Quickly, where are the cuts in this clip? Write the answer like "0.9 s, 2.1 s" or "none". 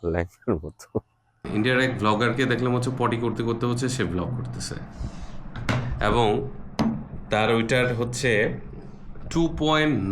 1.4 s